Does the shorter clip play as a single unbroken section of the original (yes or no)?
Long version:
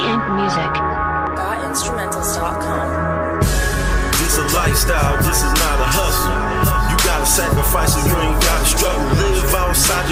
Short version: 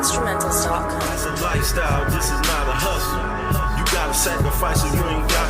no